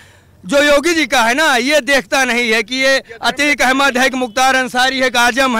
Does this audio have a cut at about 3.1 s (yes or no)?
no